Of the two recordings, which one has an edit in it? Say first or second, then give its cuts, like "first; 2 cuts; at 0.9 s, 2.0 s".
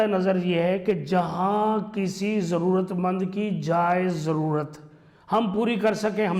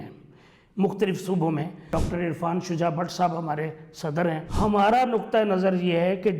second; 2 cuts; at 1.9 s, 4.5 s